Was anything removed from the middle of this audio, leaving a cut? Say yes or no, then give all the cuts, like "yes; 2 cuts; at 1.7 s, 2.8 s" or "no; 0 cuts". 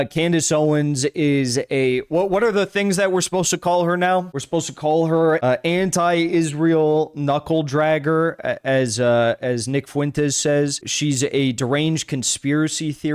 no; 0 cuts